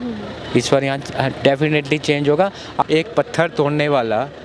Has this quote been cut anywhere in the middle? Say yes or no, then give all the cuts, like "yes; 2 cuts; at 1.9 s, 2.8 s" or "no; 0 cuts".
yes; 1 cut; at 2.8 s